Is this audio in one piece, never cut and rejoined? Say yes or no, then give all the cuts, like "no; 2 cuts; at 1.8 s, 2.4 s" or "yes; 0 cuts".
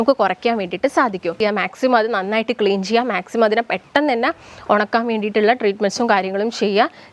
no; 1 cut; at 1.4 s